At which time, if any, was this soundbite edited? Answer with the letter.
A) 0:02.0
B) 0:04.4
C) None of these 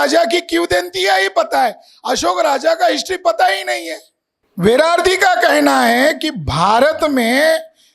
B